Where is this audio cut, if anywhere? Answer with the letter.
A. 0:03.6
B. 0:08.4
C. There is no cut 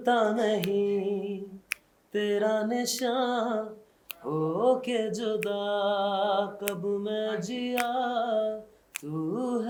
C